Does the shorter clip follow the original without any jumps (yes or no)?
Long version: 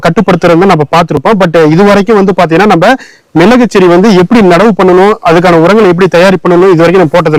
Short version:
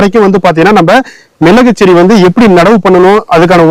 yes